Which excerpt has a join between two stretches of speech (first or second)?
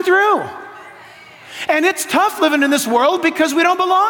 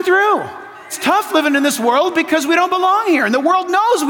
second